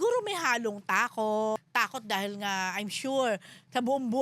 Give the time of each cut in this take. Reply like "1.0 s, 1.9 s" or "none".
1.6 s

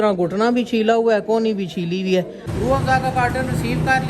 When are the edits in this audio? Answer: 2.4 s

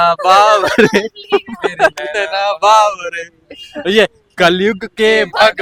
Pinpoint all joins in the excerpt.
none

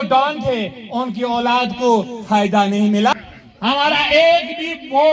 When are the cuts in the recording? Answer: 3.1 s

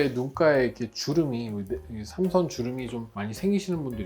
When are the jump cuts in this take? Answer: none

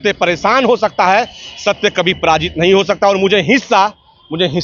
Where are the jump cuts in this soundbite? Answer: none

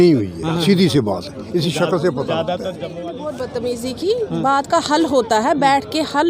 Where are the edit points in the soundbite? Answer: 3.0 s

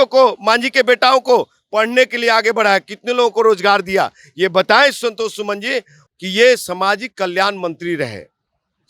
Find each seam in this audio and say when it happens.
6.0 s

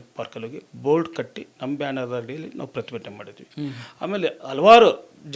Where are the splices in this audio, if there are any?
none

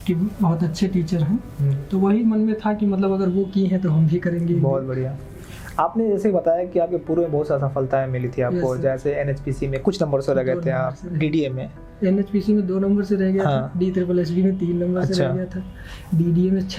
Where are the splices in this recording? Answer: none

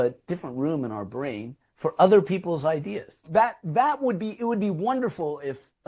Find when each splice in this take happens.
3.2 s

